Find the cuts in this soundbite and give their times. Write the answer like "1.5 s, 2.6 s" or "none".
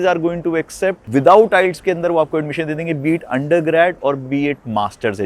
1.0 s